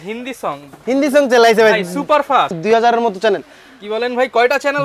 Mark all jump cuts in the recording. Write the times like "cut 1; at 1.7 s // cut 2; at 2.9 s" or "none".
cut 1; at 2.6 s